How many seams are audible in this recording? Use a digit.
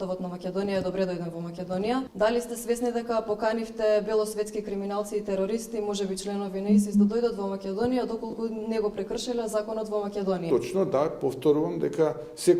2